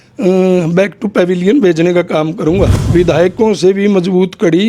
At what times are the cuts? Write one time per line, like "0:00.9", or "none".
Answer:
0:02.8